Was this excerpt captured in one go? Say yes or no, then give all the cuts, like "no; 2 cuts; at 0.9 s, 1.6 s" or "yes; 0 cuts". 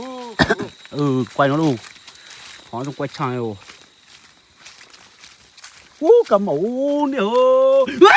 yes; 0 cuts